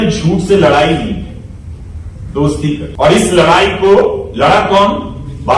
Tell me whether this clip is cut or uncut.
cut